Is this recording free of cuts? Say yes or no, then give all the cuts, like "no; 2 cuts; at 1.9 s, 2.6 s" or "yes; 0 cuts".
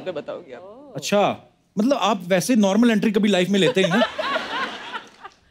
yes; 0 cuts